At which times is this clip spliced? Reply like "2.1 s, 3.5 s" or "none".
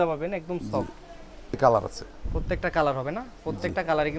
1.6 s